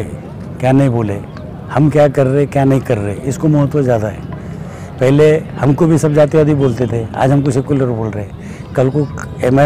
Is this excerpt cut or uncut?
uncut